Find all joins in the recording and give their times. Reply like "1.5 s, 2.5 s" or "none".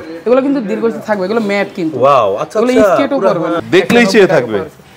3.6 s